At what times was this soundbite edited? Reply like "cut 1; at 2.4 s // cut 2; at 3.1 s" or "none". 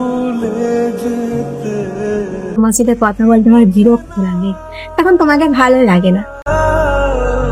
cut 1; at 2.6 s